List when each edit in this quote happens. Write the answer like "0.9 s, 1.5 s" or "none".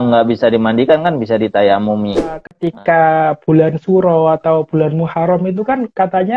2.5 s